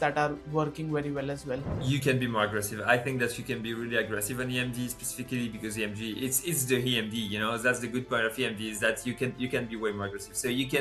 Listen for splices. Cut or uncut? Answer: uncut